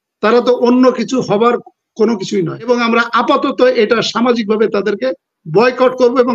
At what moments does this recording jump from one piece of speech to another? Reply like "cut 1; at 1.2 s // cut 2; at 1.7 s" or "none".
cut 1; at 2.7 s